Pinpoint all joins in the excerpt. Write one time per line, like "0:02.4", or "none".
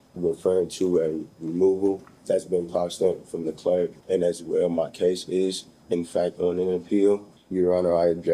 0:02.1
0:04.0
0:07.4